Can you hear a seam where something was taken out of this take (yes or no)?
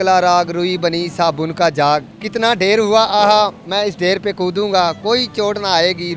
yes